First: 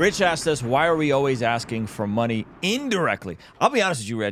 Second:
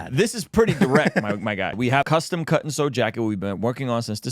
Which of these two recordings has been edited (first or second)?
second